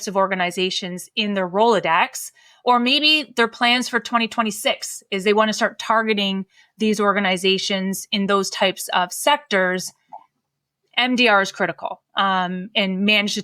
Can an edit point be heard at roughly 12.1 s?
no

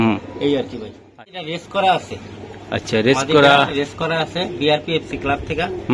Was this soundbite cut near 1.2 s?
yes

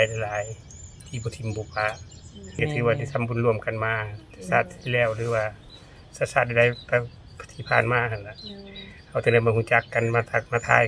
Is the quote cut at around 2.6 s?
yes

